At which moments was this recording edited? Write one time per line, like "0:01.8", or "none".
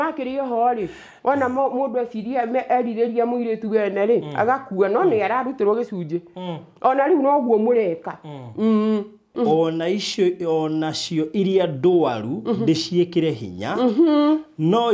0:09.2